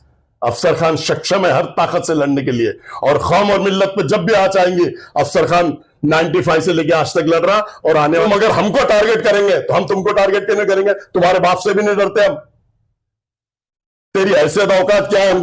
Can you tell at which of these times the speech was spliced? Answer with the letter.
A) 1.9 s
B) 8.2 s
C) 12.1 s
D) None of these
B